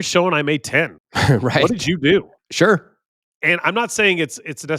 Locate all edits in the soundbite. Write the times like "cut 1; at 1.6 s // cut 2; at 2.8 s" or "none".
cut 1; at 1.0 s // cut 2; at 2.4 s